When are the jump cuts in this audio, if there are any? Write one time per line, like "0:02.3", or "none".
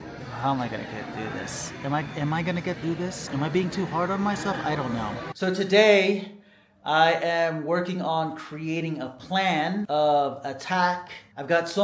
0:03.2
0:05.3